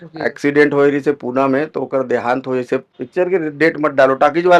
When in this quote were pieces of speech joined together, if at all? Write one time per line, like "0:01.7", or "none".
0:02.9

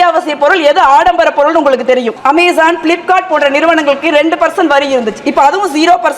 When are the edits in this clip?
0:02.1

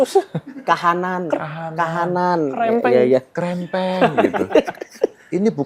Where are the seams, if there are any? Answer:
none

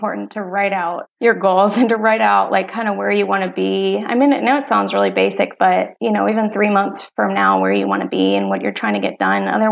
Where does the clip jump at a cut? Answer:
0:01.1
0:05.9

